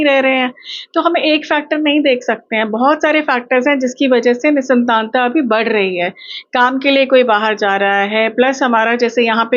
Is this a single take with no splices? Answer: yes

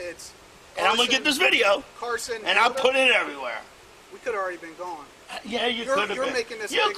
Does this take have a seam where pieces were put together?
no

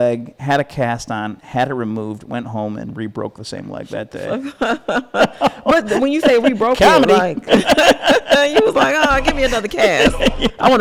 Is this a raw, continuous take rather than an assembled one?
yes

